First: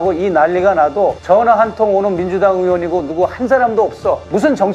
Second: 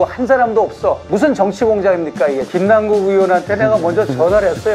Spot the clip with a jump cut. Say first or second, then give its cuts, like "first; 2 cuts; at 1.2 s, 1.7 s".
second; 1 cut; at 2.5 s